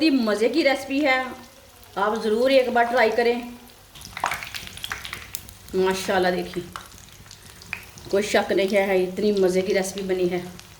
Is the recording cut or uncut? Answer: cut